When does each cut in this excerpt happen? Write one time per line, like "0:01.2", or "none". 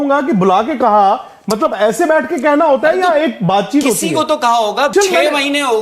0:04.9